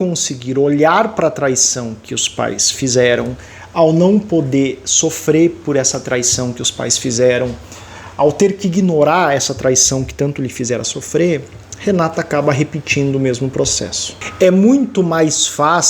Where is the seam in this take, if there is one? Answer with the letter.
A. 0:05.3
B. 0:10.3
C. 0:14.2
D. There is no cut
C